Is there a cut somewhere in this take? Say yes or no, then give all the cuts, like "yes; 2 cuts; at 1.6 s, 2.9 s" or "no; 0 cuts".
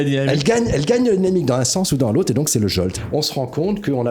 yes; 1 cut; at 3.0 s